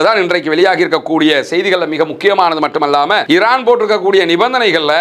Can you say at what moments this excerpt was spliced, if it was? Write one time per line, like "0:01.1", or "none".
0:03.2